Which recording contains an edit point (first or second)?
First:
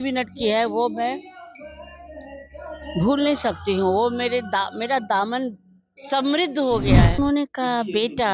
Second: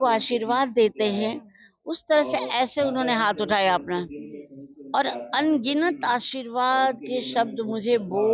first